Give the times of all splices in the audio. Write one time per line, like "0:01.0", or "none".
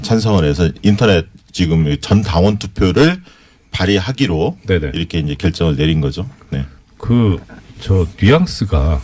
0:05.9